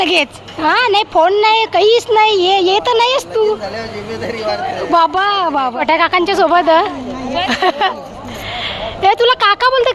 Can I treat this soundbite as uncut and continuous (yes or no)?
no